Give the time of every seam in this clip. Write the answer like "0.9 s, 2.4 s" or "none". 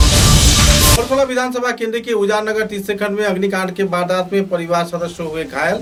none